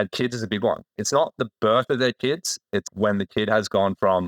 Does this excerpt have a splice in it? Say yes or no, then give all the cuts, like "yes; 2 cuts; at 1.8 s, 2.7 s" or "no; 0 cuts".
yes; 2 cuts; at 1.0 s, 2.9 s